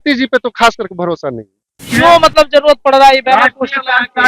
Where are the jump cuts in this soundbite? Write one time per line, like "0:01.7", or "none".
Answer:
0:01.8